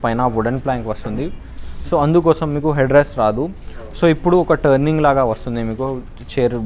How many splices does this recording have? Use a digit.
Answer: 0